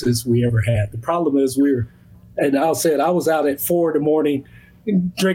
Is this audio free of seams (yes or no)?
yes